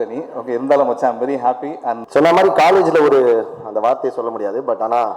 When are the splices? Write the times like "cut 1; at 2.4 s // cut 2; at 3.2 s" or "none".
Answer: cut 1; at 1.9 s